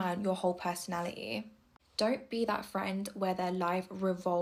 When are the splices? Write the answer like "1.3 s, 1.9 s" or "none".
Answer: none